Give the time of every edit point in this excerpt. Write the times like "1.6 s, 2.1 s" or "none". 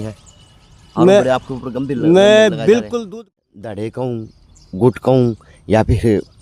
3.0 s